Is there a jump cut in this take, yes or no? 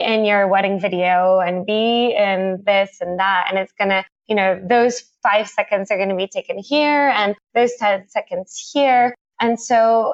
no